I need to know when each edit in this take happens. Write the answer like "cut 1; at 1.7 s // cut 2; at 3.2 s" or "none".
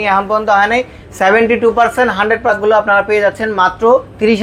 cut 1; at 2.5 s